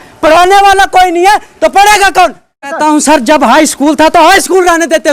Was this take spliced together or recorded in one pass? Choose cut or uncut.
cut